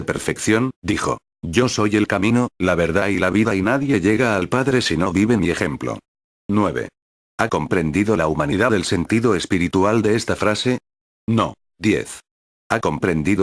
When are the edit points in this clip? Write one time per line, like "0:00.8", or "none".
none